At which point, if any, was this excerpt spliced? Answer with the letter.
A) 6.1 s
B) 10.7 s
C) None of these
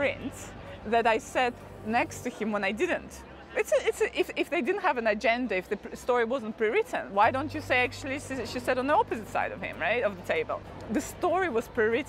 B